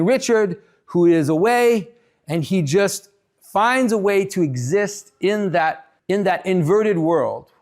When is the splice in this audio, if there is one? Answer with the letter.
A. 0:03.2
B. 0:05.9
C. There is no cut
B